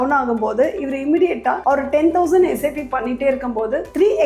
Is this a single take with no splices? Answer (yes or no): no